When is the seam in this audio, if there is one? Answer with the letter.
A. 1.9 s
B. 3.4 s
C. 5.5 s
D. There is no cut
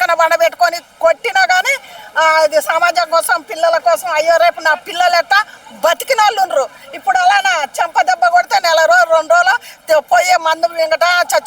D